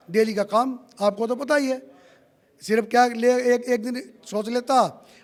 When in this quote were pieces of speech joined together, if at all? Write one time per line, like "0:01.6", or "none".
none